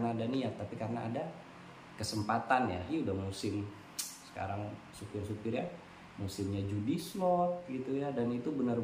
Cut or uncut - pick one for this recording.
cut